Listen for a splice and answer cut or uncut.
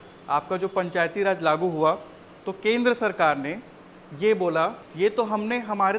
cut